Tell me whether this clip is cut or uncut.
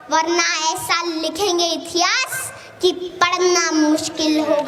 uncut